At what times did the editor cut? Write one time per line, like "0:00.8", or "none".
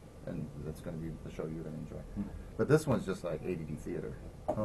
0:03.3